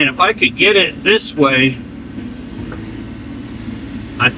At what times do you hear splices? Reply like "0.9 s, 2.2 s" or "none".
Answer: none